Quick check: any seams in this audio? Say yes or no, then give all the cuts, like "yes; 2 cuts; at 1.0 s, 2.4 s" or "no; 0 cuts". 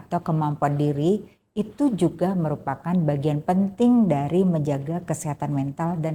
no; 0 cuts